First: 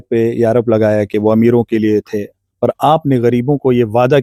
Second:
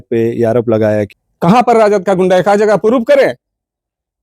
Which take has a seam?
second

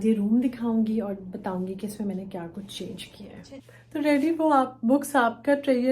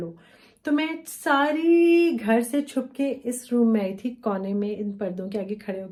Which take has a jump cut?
first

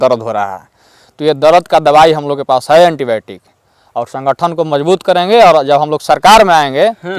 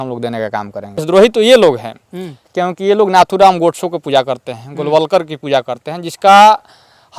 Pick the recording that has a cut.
second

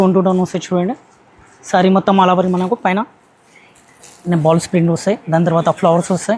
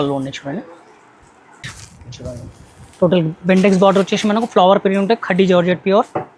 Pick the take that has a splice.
second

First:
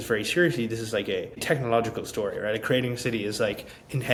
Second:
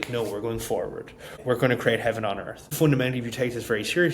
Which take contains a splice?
second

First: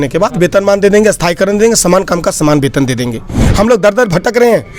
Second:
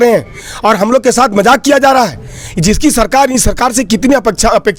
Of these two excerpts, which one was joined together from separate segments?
first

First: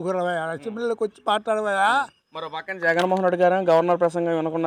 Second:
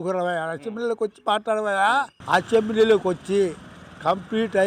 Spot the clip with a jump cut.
second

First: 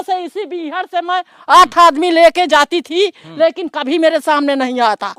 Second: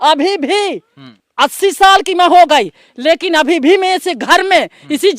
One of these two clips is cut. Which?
second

